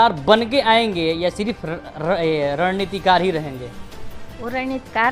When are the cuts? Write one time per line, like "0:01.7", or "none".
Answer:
none